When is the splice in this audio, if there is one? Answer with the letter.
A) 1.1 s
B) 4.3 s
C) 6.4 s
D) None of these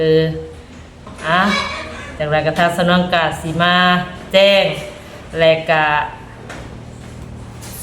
A